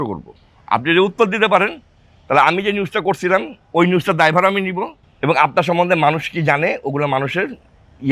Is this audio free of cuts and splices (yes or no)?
no